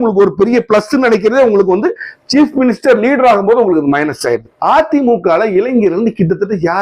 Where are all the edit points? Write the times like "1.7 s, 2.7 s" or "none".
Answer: 4.5 s